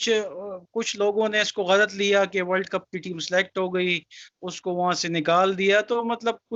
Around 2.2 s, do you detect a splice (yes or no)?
no